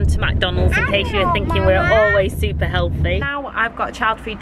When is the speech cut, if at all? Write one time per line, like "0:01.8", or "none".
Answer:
0:03.2